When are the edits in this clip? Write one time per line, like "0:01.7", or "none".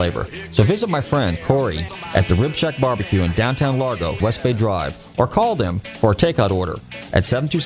0:01.6
0:04.2